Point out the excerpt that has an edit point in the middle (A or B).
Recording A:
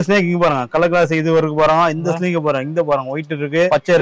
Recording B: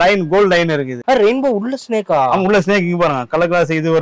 B